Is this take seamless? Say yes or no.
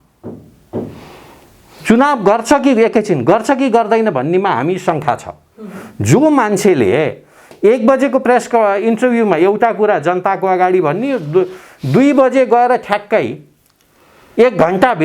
yes